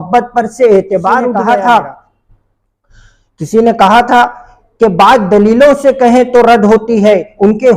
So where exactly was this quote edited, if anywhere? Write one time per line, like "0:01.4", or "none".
0:01.3

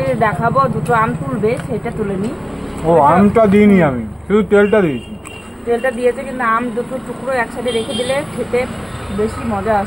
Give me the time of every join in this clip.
none

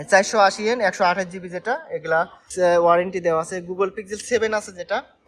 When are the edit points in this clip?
0:02.5

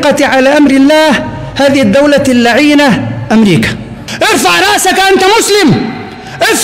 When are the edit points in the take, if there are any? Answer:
0:04.0

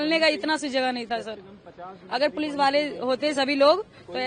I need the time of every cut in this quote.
none

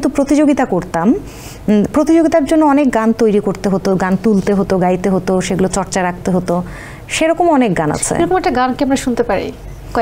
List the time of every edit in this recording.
none

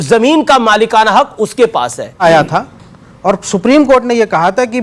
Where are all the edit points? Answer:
0:02.2

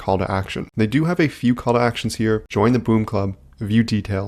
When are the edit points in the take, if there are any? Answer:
none

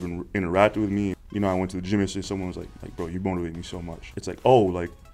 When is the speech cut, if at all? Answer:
0:01.1
0:02.7
0:04.0

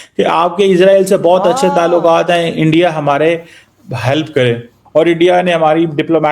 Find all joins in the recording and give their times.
0:04.7

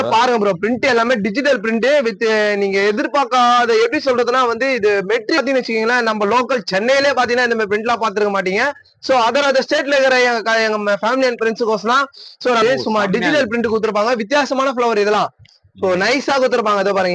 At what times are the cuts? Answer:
0:05.4
0:12.6

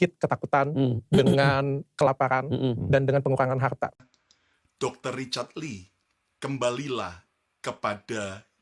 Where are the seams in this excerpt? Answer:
0:04.0

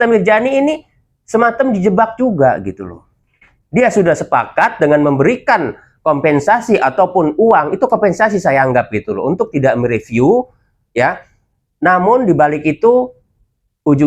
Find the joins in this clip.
none

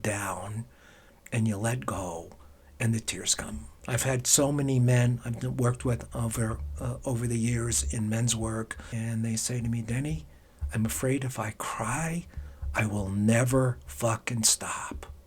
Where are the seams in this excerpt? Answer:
0:03.7
0:08.9

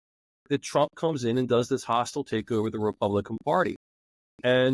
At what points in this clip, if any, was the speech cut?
none

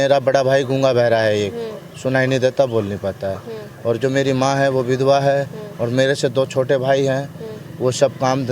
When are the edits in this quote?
none

